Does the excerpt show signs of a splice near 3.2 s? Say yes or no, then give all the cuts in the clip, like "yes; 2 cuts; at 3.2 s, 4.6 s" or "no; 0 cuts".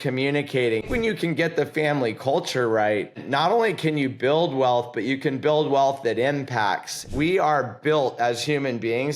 yes; 3 cuts; at 0.9 s, 3.2 s, 7.1 s